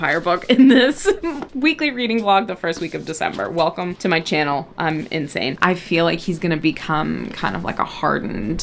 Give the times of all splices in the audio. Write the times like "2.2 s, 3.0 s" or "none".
5.5 s